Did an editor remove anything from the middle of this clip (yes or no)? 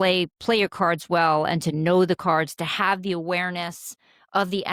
no